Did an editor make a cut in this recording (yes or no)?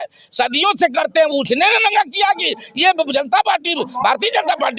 no